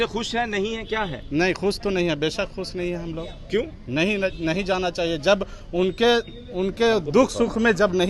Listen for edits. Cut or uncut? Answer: uncut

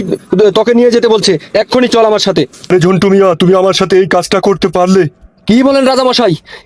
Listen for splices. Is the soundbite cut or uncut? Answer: cut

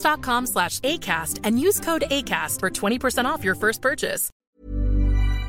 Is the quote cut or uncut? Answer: cut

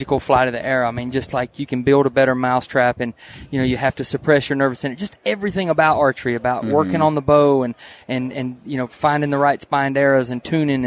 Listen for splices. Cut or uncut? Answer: uncut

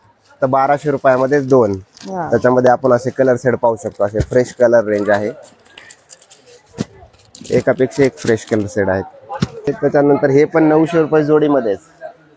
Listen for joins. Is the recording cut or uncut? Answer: cut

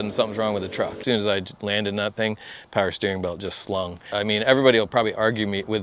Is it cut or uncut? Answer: cut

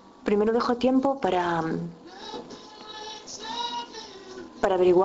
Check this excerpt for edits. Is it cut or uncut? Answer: cut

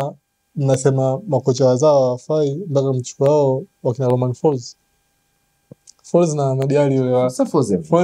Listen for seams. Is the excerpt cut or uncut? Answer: uncut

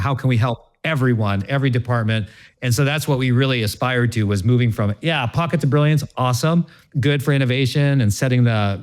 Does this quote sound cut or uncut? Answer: cut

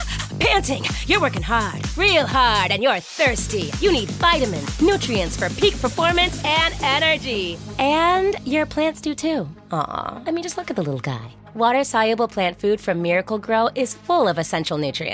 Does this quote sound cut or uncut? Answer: uncut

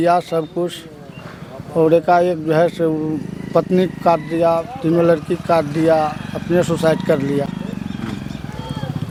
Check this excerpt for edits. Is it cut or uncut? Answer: uncut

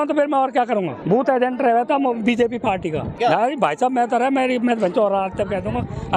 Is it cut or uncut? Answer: cut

